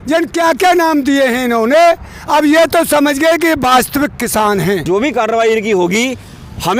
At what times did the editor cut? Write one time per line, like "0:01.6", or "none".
0:04.8

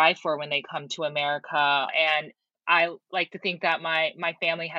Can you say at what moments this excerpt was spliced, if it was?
0:01.9

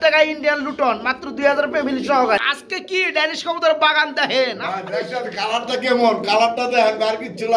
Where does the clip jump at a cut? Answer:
0:02.6

